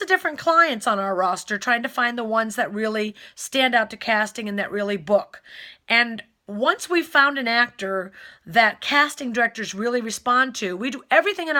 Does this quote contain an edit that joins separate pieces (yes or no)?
no